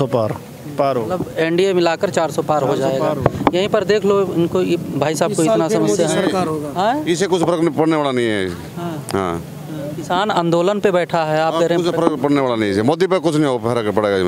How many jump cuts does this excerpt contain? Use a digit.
0